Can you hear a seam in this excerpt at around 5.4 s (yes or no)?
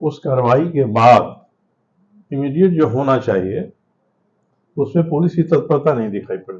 no